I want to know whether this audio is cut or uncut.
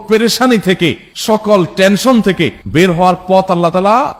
uncut